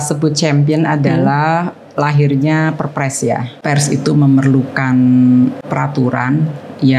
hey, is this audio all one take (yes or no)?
no